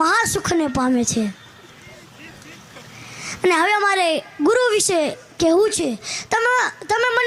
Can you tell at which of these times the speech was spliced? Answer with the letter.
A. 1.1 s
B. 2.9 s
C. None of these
C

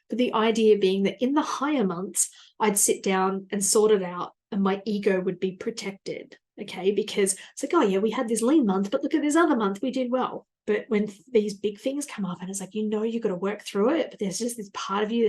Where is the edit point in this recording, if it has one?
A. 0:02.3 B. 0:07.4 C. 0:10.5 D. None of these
C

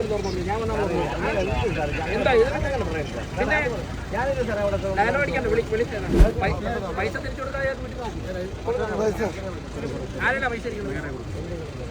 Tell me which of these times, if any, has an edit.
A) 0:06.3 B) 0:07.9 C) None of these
A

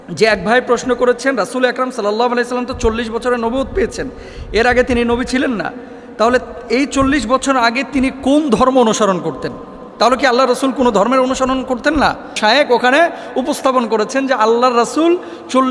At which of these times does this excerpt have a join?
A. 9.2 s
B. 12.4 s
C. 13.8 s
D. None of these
B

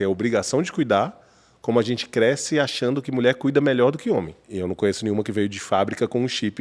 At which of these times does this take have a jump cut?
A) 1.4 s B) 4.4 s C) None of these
B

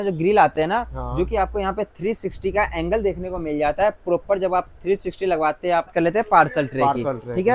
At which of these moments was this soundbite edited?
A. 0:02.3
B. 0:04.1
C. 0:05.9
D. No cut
C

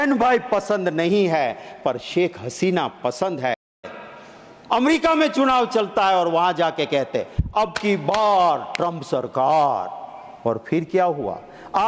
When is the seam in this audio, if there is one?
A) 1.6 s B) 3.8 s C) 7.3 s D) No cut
B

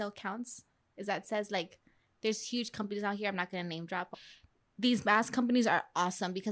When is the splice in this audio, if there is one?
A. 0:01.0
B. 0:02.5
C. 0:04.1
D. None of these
C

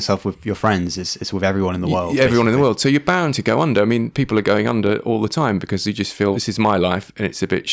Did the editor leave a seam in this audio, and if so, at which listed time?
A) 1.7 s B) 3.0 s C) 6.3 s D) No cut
C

